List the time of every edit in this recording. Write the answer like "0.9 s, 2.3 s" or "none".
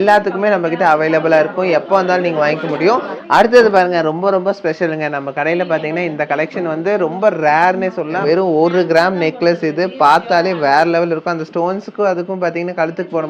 3.1 s, 8.2 s